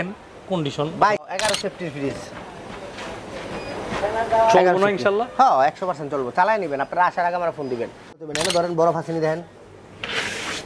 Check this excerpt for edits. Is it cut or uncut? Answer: cut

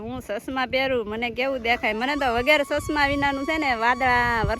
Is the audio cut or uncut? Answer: uncut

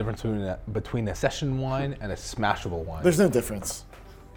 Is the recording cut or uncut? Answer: cut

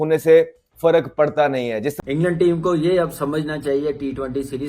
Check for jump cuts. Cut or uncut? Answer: cut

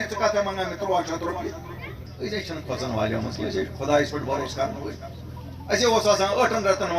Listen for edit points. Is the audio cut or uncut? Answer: cut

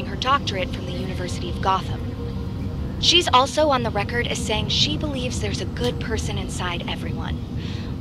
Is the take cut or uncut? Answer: uncut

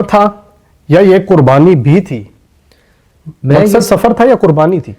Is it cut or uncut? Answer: uncut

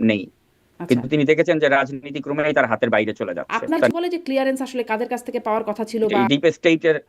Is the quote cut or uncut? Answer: cut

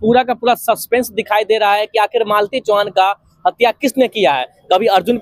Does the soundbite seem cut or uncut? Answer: uncut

